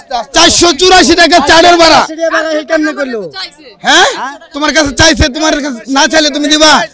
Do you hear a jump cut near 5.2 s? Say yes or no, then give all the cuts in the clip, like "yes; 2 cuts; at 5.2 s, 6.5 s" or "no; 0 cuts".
no; 0 cuts